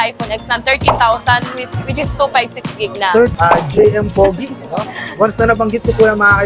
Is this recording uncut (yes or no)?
no